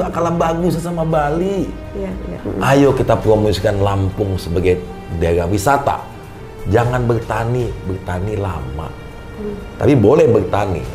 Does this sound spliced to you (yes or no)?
yes